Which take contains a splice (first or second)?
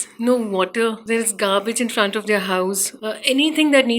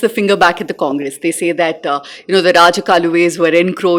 first